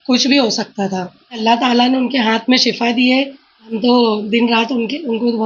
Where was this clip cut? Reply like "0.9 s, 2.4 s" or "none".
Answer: 1.4 s, 3.7 s

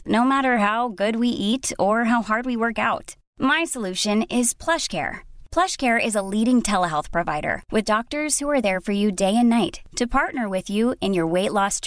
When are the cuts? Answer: none

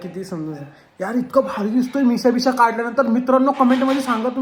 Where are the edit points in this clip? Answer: none

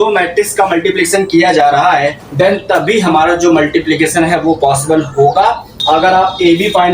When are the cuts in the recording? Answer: 2.2 s, 5.7 s

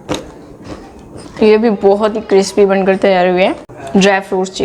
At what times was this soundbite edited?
1.3 s, 3.7 s

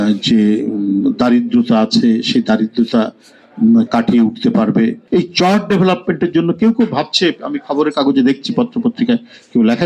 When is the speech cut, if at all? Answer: 5.0 s

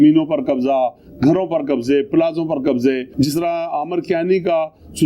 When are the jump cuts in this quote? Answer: 3.1 s

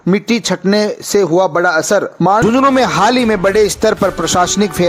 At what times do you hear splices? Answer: 2.4 s

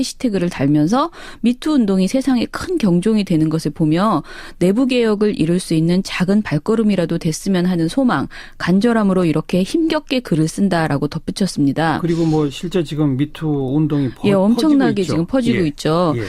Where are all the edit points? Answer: 10.2 s

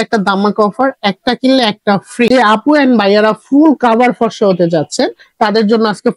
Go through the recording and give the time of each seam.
2.3 s

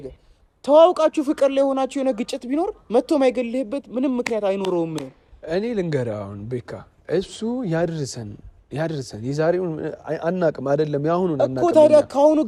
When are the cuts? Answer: none

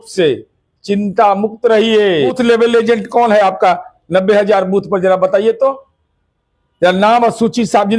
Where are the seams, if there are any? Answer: 2.4 s

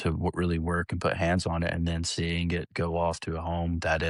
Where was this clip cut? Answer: none

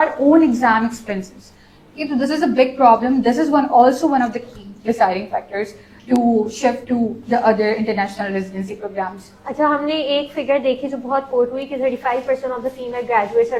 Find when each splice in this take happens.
none

